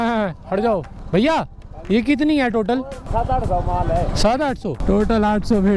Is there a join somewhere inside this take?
yes; 3 cuts; at 1.0 s, 3.0 s, 4.7 s

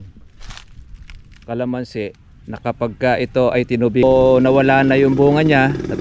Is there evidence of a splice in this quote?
yes; 1 cut; at 4.0 s

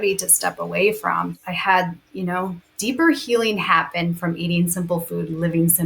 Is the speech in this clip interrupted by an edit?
yes; 1 cut; at 1.4 s

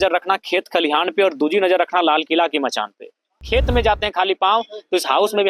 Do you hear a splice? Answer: yes; 1 cut; at 3.4 s

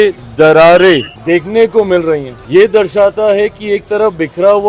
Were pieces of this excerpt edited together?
yes; 2 cuts; at 1.1 s, 2.3 s

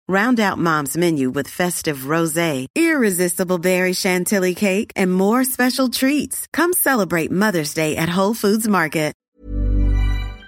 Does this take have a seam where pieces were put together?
yes; 1 cut; at 9.4 s

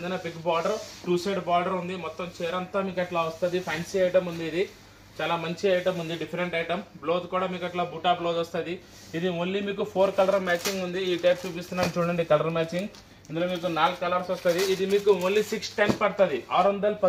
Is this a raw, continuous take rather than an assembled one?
yes; 0 cuts

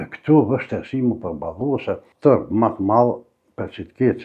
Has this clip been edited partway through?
yes; 1 cut; at 2.1 s

